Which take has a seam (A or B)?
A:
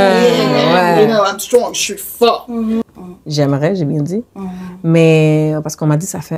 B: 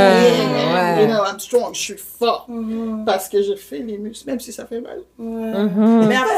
A